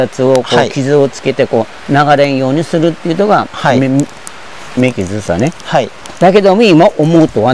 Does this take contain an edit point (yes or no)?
no